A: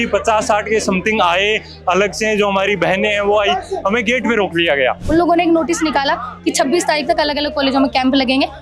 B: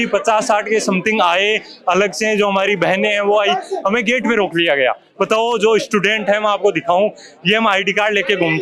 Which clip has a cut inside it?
A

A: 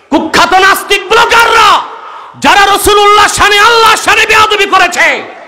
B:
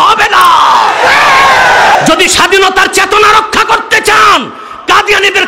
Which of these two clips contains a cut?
B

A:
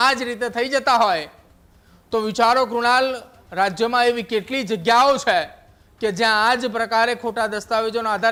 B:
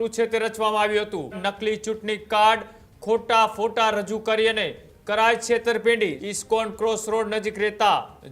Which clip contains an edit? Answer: B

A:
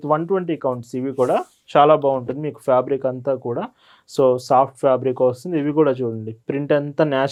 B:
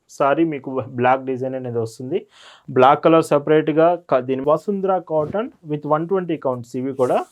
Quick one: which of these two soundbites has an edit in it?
B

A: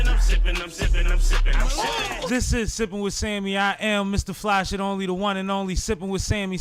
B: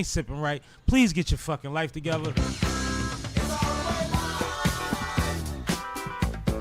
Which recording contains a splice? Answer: B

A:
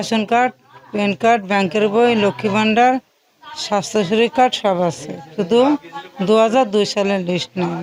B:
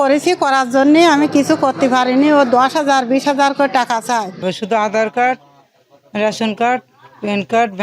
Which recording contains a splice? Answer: B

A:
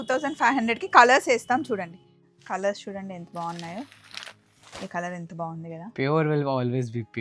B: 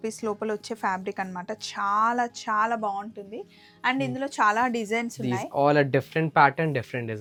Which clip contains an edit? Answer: A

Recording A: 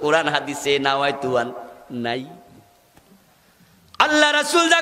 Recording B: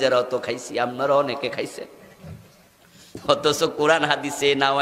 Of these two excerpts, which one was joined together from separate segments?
A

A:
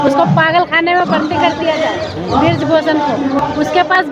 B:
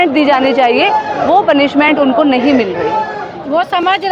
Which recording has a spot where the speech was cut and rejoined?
B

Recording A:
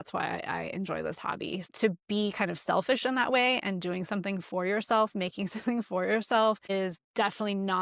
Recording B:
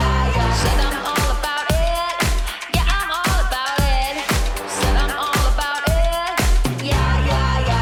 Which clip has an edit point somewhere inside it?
A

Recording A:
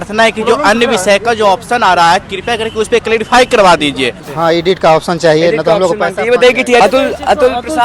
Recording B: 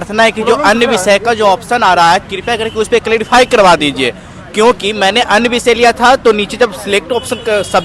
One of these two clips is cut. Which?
A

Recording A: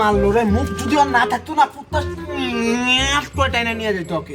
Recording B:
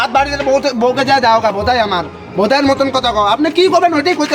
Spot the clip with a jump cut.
A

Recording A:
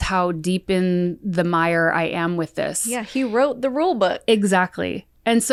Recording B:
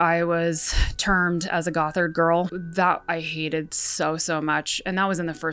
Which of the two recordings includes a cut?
B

